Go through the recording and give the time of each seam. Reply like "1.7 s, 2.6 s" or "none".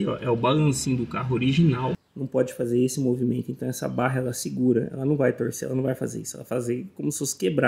2.1 s